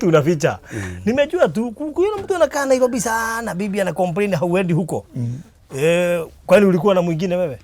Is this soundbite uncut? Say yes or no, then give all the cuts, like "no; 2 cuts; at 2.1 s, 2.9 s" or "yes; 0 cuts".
yes; 0 cuts